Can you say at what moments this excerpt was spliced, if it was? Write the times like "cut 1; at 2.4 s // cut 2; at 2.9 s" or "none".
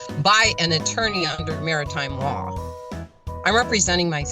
none